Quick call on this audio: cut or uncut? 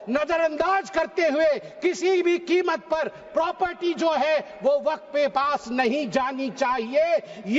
uncut